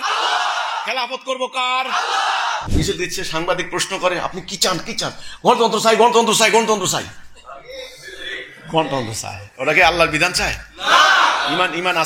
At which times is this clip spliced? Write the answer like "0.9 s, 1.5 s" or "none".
2.7 s